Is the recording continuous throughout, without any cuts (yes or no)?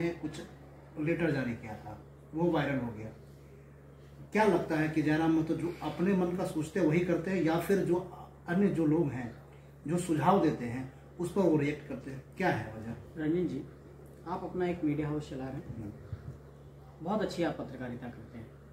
yes